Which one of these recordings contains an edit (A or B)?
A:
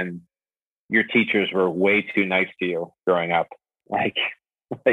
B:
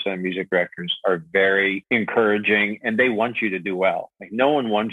B